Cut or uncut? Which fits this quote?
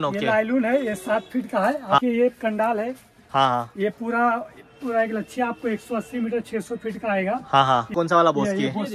cut